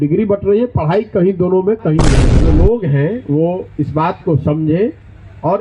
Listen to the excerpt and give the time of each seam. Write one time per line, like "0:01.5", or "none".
0:02.2